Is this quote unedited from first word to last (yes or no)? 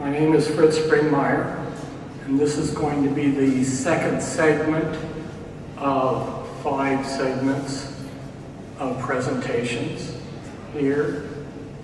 yes